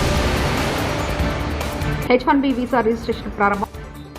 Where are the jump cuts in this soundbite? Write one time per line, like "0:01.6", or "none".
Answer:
0:01.9